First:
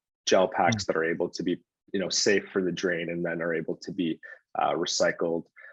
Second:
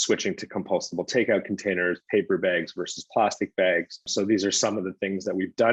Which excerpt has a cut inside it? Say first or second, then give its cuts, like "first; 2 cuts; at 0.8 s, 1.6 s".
second; 1 cut; at 4.1 s